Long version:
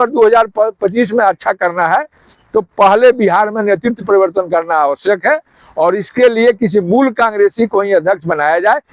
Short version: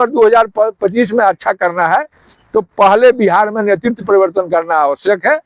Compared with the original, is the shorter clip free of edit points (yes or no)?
yes